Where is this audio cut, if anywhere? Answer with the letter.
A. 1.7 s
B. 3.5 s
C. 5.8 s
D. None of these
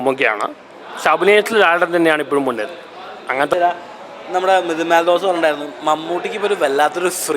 B